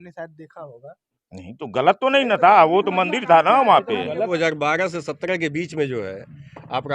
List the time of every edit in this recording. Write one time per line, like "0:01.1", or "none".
0:04.3